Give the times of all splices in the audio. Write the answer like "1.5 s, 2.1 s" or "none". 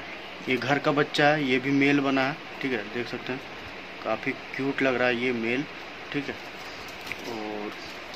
none

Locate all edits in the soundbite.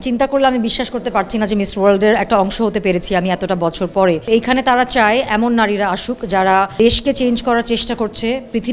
4.3 s, 6.7 s

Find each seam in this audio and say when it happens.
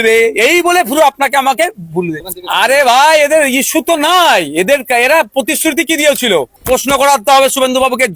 2.2 s, 6.5 s

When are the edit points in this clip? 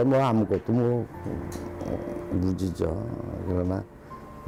none

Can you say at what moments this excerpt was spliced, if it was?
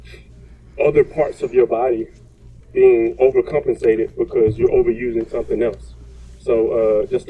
4.5 s

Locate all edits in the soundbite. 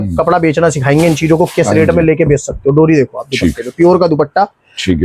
none

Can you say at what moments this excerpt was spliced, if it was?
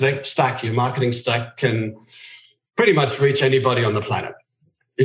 none

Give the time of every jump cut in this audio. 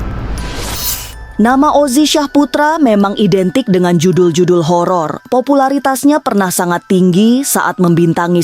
none

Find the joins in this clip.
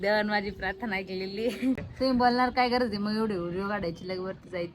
1.9 s

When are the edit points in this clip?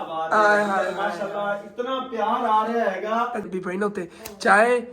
3.5 s

